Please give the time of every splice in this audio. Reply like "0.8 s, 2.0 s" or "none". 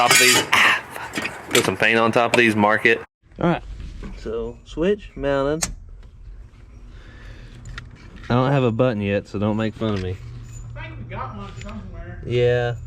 3.2 s